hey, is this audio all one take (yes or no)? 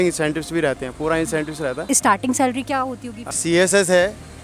no